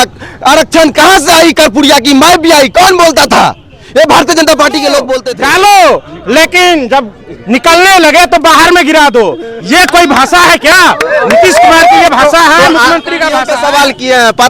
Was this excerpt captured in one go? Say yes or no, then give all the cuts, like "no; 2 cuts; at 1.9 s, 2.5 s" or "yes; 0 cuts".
no; 2 cuts; at 5.2 s, 13.5 s